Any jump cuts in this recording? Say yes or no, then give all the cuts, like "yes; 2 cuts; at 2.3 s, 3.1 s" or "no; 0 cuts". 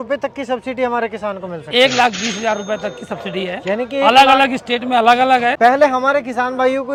no; 0 cuts